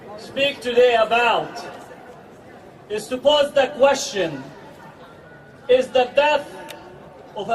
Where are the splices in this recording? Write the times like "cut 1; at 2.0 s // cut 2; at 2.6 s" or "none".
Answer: none

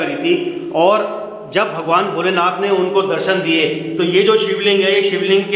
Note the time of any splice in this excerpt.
none

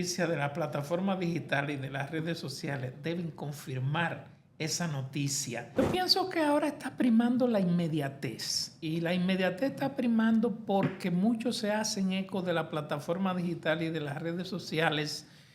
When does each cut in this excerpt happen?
cut 1; at 5.8 s

